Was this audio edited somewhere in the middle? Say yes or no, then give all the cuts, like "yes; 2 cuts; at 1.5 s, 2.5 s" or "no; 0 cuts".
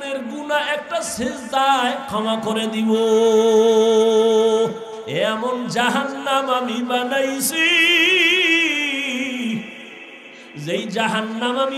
yes; 1 cut; at 5.0 s